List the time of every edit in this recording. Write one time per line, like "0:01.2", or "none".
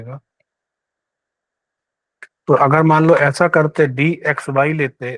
0:02.0